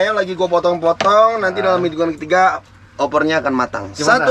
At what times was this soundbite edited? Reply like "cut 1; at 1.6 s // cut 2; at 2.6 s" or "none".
none